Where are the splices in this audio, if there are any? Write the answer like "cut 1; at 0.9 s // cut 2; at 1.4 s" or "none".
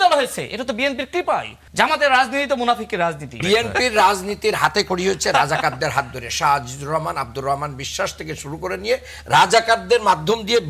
cut 1; at 1.6 s // cut 2; at 3.3 s